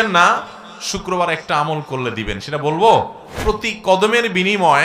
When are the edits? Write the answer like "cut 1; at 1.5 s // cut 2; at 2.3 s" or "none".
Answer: cut 1; at 3.3 s